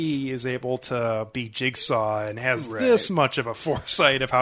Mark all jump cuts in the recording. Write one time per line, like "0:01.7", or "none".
none